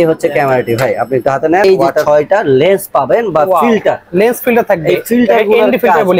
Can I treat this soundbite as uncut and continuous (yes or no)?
no